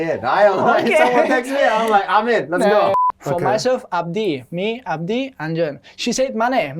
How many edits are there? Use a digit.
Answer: 1